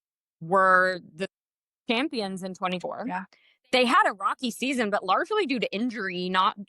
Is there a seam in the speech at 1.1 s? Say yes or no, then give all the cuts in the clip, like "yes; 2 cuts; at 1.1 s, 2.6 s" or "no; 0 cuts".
no; 1 cut; at 2.8 s